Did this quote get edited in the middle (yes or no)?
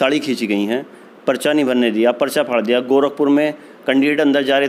no